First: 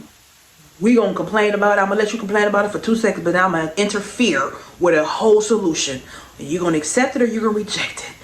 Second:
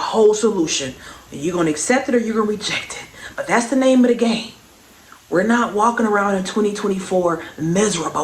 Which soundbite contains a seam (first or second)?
first